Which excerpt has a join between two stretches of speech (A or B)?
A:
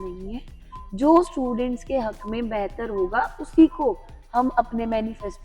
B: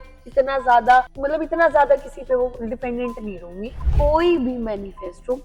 B